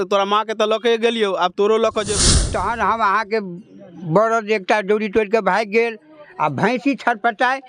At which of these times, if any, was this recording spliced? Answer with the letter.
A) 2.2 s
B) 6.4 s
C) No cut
A